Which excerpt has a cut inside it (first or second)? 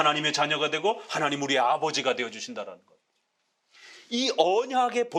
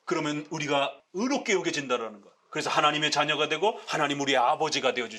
second